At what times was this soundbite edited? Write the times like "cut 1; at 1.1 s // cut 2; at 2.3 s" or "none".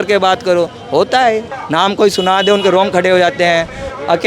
cut 1; at 1.5 s